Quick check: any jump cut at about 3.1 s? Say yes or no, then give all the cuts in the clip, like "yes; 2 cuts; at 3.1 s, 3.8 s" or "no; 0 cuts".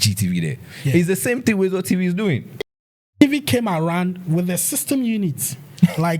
yes; 1 cut; at 3.1 s